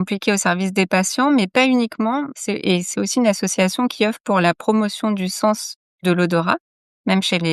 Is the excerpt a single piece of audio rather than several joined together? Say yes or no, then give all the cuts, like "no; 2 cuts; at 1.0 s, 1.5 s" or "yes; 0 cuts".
yes; 0 cuts